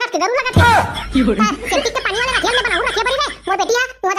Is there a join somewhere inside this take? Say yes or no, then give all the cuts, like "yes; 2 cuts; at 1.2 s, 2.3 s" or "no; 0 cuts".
no; 0 cuts